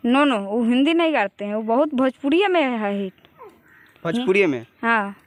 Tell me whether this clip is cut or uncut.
uncut